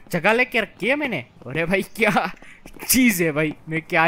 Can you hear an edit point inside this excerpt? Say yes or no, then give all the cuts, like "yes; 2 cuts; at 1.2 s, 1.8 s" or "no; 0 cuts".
yes; 1 cut; at 1.3 s